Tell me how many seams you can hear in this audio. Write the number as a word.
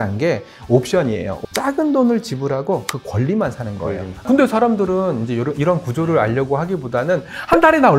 two